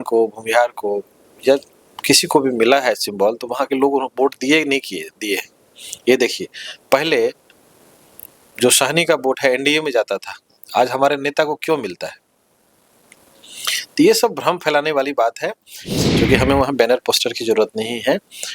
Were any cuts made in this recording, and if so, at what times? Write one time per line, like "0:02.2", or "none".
0:15.8